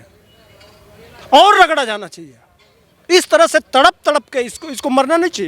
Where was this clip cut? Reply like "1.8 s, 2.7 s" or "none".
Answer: none